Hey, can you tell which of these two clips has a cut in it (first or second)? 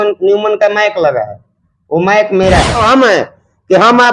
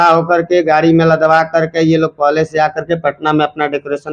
first